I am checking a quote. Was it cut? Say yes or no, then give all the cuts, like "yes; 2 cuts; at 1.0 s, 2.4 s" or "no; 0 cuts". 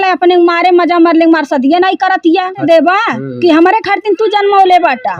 yes; 1 cut; at 2.6 s